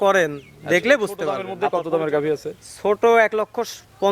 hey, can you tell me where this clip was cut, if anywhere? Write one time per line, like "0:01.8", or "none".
0:01.5